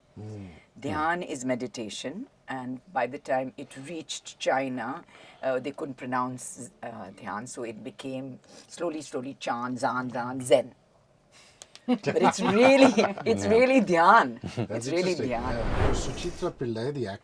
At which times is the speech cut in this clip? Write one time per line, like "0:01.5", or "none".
0:15.8